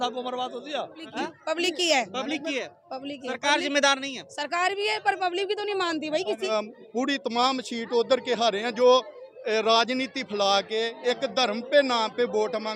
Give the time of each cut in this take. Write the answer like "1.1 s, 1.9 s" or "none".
1.0 s, 6.5 s